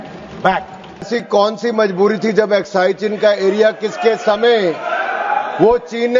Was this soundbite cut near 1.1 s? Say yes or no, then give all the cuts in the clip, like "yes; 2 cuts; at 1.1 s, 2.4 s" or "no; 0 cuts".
yes; 1 cut; at 1.1 s